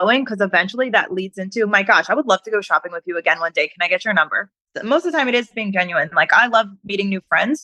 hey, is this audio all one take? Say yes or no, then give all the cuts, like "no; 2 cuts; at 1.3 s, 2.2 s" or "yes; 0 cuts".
no; 1 cut; at 4.7 s